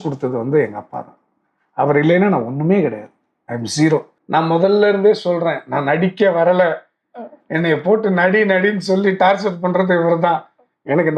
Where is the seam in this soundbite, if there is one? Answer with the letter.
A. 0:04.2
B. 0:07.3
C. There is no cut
A